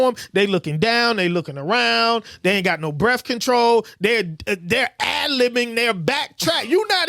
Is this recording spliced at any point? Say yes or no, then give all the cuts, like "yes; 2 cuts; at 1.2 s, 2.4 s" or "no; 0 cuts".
no; 0 cuts